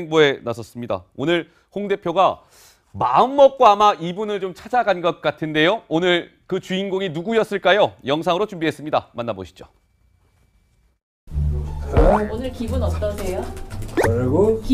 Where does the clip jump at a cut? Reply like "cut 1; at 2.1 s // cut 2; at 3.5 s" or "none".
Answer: none